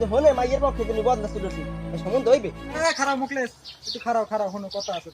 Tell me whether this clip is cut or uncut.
cut